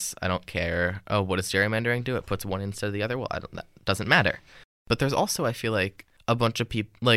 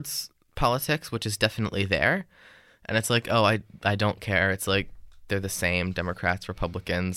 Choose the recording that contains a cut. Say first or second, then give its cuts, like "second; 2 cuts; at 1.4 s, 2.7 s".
first; 2 cuts; at 4.7 s, 6.1 s